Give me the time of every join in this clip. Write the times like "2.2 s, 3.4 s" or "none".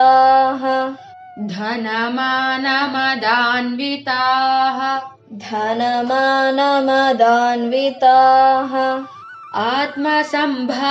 none

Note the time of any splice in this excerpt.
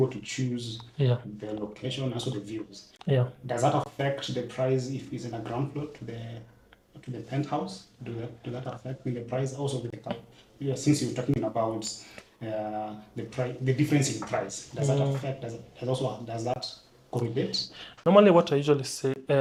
none

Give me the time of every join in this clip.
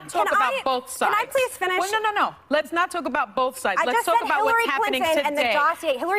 2.4 s

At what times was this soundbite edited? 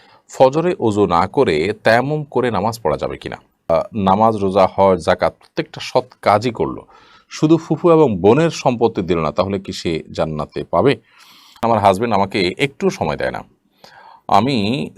3.7 s, 11.5 s

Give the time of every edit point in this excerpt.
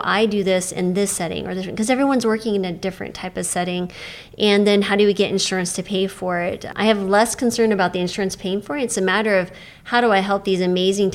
6.7 s

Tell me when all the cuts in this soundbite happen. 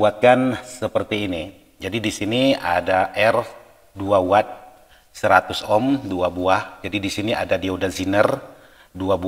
none

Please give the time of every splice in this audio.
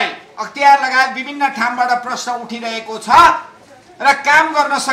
none

